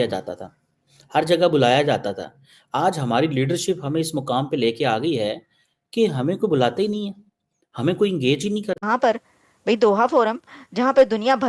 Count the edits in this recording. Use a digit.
1